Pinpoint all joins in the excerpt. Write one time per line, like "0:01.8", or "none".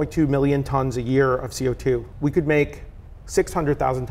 0:02.1

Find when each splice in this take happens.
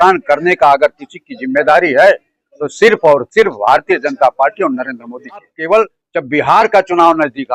0:05.5

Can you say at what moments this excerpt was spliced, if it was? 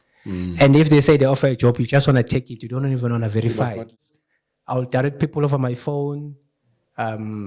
0:04.0

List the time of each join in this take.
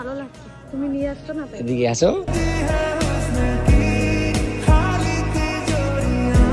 none

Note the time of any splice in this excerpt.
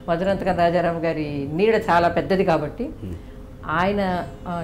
none

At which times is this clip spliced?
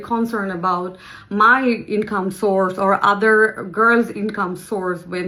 none

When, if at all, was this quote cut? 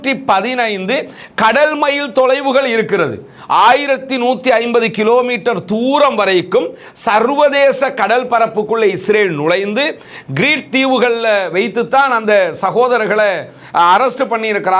none

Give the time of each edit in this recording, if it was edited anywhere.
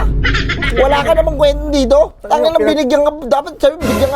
none

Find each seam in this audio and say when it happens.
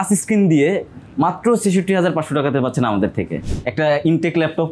0:03.4

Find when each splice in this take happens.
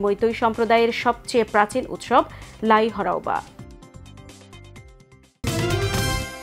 0:05.4

